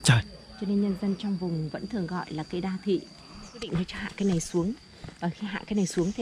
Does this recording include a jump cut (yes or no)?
yes